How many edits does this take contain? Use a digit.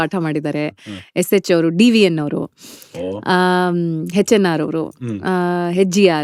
0